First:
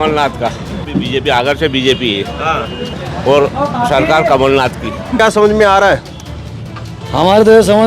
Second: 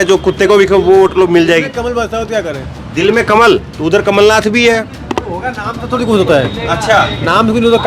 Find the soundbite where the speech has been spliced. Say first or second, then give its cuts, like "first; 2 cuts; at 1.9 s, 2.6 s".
first; 3 cuts; at 0.8 s, 2.9 s, 5.2 s